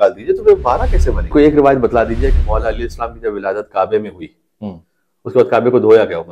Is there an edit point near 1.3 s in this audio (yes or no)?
yes